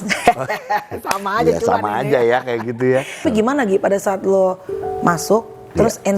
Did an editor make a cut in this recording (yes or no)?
yes